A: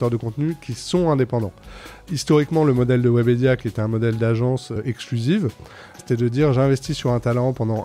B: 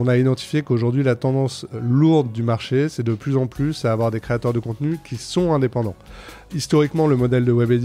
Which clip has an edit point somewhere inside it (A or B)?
A